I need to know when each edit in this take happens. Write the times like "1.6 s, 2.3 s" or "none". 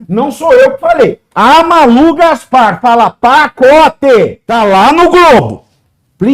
4.4 s